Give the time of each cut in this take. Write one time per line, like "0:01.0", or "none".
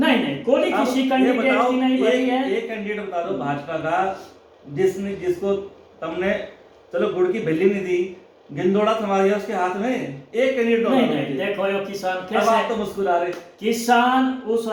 none